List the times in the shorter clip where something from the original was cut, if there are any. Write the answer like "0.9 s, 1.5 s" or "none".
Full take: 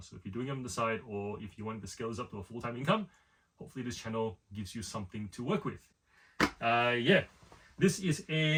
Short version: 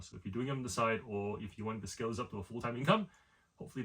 none